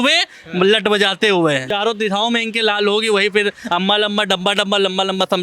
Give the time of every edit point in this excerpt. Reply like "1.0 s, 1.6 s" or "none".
1.7 s